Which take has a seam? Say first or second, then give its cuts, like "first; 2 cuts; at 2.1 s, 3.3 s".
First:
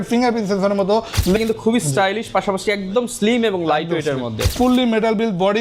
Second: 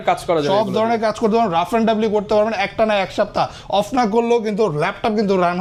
first; 2 cuts; at 1.4 s, 4.5 s